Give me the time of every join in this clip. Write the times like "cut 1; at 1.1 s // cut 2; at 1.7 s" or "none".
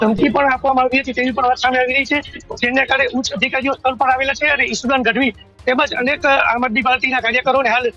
none